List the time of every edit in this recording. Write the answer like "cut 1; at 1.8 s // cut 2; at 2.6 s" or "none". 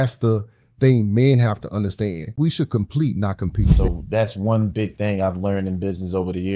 cut 1; at 2.3 s // cut 2; at 3.7 s